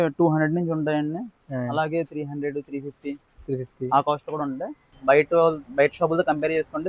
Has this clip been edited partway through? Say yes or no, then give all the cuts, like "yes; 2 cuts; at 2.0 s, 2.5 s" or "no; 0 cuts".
yes; 1 cut; at 4.9 s